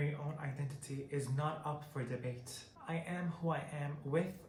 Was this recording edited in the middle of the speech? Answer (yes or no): no